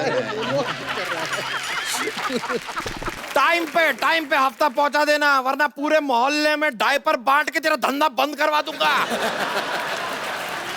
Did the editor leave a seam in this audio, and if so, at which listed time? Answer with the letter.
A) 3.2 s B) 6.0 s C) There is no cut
A